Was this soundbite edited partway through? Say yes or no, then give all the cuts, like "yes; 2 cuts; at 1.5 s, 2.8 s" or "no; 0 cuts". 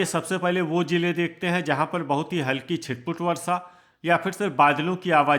no; 0 cuts